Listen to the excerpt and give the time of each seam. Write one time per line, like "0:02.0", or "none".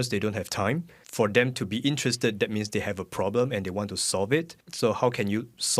0:01.0
0:04.6